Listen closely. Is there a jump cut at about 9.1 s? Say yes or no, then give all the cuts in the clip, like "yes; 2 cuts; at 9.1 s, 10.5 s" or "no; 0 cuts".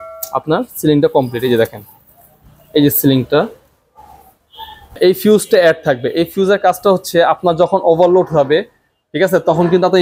no; 1 cut; at 5.0 s